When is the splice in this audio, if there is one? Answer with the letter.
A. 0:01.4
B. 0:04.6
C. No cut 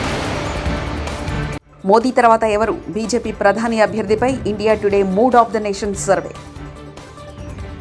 A